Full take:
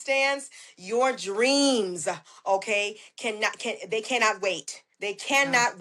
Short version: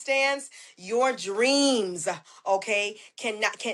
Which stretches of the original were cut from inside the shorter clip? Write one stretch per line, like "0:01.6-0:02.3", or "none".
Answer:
none